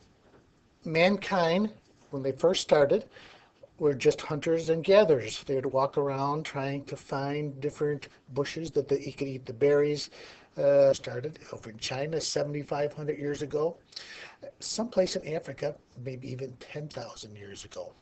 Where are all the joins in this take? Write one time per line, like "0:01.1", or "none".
none